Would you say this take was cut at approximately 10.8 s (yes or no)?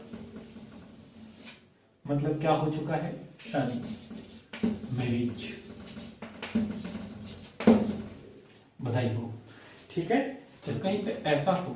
yes